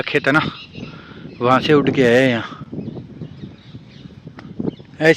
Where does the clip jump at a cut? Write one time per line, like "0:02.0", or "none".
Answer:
none